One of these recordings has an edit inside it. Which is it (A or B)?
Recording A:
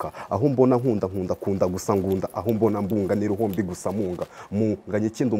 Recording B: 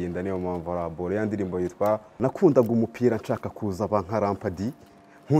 B